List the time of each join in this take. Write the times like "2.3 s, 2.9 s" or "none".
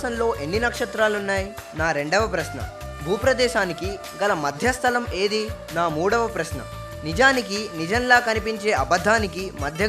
1.6 s, 5.6 s